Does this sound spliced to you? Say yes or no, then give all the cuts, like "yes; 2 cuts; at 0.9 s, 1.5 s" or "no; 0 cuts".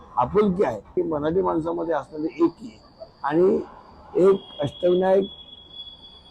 yes; 1 cut; at 0.9 s